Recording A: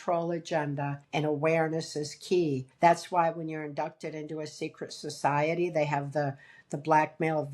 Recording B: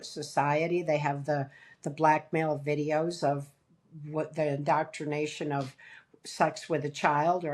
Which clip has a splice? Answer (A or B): A